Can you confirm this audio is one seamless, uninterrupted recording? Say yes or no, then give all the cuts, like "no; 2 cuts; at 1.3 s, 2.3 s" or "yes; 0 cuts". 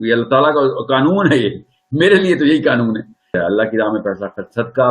no; 1 cut; at 3.4 s